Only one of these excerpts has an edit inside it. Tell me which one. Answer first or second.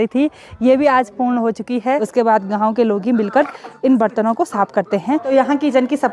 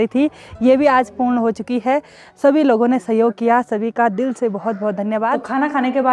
first